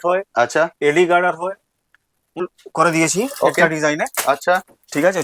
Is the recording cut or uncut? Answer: cut